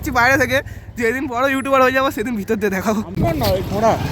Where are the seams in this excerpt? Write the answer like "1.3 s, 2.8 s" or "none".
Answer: 3.1 s